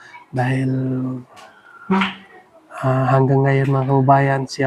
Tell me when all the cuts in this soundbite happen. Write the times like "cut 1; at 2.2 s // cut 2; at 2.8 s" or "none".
none

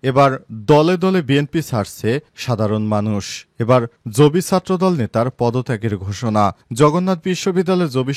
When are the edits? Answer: none

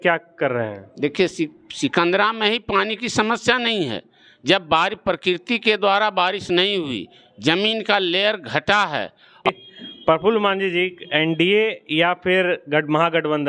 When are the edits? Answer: cut 1; at 9.5 s

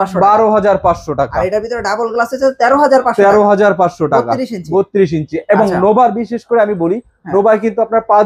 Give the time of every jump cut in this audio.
none

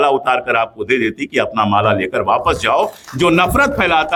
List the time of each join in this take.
none

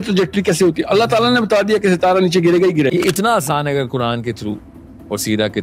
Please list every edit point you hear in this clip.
cut 1; at 2.9 s

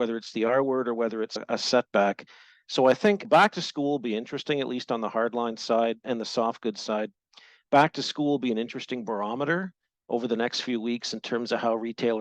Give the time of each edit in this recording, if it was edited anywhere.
cut 1; at 1.4 s // cut 2; at 6.0 s

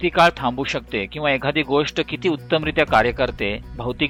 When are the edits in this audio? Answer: none

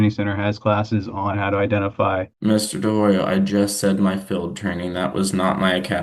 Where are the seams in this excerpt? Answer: none

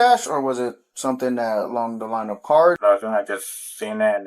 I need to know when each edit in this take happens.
cut 1; at 2.8 s

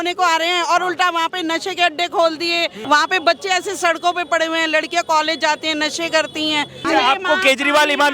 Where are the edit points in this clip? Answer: cut 1; at 2.8 s // cut 2; at 6.9 s

